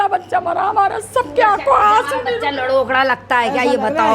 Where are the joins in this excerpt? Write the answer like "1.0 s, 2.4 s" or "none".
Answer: none